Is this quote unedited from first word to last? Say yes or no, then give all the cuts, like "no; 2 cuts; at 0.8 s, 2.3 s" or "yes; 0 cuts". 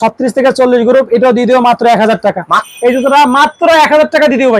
no; 1 cut; at 2.7 s